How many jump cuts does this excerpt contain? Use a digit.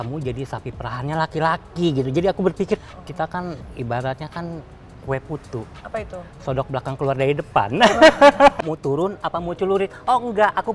2